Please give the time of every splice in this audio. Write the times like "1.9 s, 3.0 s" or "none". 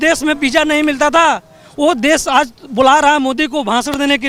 none